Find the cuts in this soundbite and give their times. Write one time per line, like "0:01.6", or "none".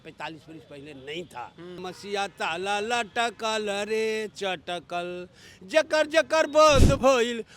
0:01.8